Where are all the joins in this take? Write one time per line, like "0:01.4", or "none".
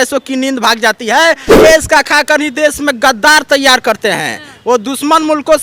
0:01.5